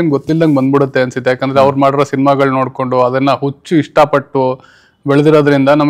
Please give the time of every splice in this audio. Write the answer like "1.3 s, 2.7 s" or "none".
none